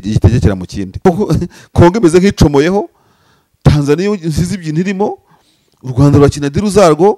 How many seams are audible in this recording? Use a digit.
1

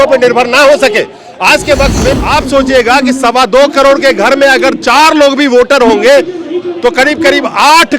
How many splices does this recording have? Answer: 1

